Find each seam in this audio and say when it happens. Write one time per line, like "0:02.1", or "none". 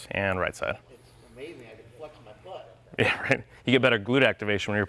none